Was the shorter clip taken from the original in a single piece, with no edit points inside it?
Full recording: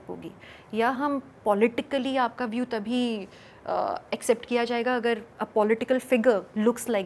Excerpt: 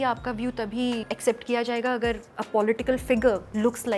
no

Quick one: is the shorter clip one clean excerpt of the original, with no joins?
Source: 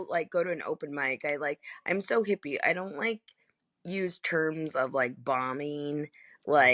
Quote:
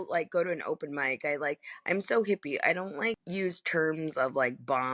no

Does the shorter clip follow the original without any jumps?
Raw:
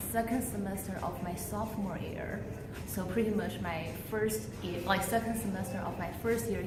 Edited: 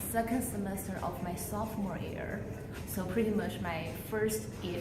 yes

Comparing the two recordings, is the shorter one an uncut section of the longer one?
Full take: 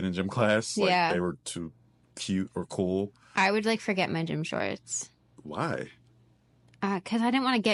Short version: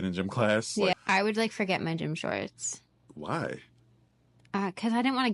no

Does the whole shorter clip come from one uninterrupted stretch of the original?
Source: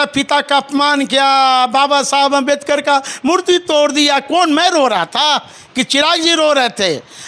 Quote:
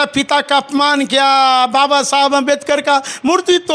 yes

